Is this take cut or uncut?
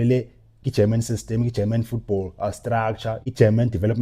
uncut